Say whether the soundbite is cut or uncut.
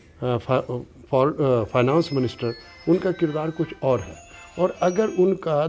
uncut